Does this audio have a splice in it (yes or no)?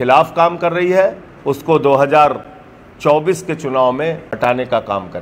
yes